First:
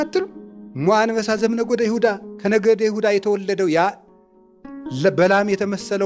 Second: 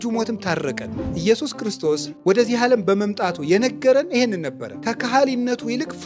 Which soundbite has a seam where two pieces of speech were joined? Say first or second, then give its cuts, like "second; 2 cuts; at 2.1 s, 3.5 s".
second; 3 cuts; at 1.1 s, 2.1 s, 4.7 s